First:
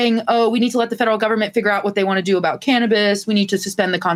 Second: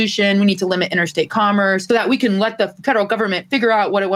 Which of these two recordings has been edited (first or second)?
second